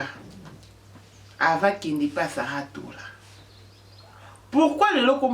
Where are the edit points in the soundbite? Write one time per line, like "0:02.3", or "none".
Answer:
none